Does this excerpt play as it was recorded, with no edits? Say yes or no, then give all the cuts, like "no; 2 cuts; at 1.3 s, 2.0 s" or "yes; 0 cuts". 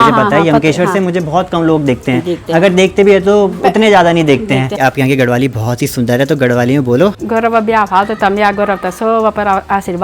no; 2 cuts; at 4.8 s, 7.2 s